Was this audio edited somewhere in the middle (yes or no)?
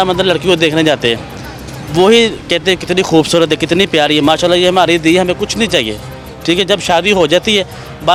no